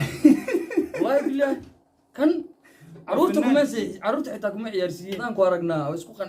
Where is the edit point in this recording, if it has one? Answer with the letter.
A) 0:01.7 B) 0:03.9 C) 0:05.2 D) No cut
C